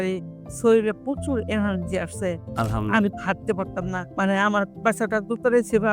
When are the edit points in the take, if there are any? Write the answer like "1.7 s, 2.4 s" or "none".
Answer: 4.0 s